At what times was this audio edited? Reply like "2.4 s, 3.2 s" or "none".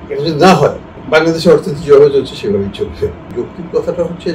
0.9 s, 3.3 s